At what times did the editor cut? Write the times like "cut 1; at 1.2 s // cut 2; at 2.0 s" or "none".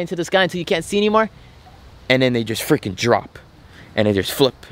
none